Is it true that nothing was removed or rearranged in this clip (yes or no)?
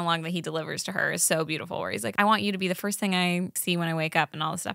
no